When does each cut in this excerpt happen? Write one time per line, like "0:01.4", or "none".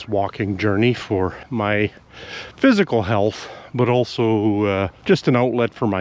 0:01.4
0:04.9